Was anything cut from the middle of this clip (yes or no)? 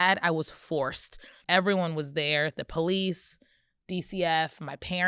yes